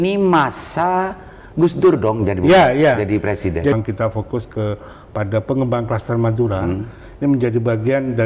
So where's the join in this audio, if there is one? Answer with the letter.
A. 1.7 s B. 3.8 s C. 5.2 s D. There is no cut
B